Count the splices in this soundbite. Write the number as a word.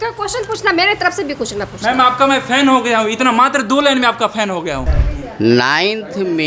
one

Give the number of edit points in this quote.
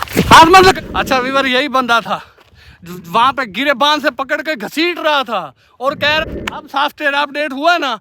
two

